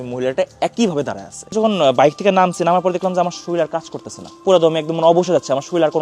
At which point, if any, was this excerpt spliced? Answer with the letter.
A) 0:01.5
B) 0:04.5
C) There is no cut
A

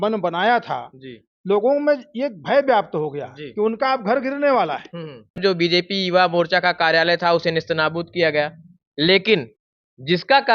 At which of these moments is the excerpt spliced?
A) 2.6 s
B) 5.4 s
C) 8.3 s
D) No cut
B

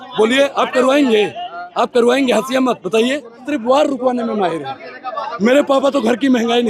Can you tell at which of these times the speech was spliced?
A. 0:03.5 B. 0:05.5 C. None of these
A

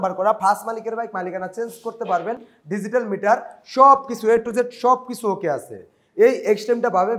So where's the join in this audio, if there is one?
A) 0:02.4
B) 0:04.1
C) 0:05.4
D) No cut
D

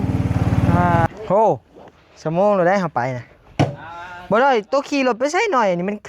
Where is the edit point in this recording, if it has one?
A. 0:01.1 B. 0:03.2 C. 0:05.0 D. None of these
A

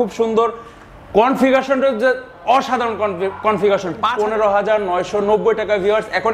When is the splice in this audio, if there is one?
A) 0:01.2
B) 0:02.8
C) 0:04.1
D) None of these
C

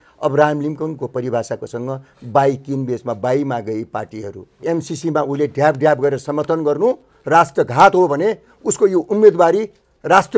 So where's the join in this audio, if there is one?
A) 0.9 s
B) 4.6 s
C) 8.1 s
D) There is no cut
B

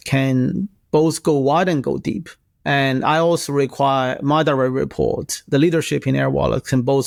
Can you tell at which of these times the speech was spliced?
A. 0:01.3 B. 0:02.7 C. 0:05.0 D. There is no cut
D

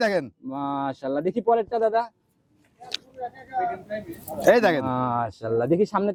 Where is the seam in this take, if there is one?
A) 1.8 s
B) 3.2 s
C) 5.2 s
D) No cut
D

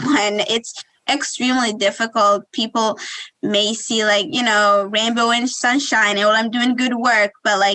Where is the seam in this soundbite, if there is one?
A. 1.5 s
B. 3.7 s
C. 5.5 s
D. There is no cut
C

